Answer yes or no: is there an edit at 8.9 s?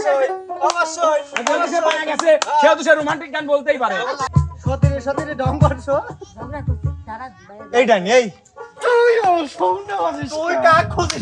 no